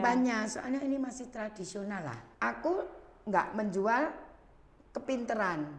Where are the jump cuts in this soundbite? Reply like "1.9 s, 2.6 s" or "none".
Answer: 2.2 s